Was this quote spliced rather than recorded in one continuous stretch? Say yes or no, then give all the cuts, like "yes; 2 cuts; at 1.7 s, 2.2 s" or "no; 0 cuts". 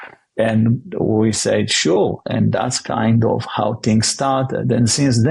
no; 0 cuts